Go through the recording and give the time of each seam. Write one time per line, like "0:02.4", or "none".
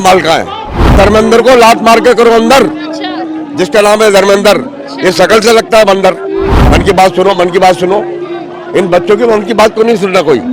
0:00.9
0:06.6